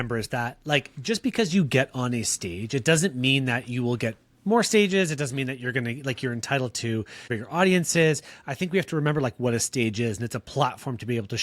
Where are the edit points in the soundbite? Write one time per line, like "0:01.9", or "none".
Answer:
0:07.4